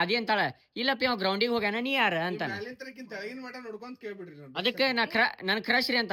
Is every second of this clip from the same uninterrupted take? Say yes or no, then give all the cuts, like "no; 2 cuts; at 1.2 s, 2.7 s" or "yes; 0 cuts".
yes; 0 cuts